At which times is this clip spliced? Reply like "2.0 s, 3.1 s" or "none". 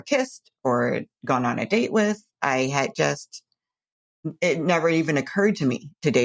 none